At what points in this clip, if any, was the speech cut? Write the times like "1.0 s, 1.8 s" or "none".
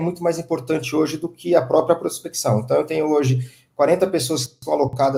none